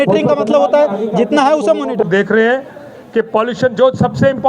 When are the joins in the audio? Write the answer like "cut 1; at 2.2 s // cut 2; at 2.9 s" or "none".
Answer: cut 1; at 2.0 s